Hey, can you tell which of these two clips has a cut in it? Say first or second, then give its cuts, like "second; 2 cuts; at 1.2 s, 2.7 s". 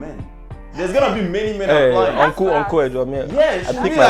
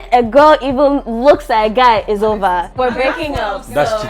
second; 1 cut; at 2.7 s